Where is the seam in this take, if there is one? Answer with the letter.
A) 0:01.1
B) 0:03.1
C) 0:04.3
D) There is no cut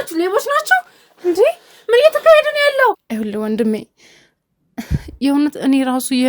B